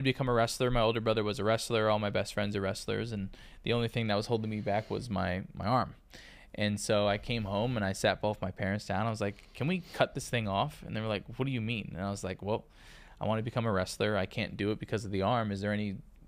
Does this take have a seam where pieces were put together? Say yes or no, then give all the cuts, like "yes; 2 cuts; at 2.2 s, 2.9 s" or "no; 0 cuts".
no; 0 cuts